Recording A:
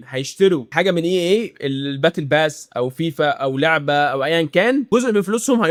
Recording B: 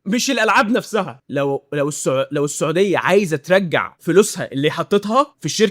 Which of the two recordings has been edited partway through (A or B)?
B